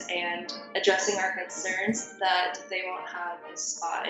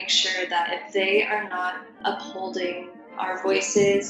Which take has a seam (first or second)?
second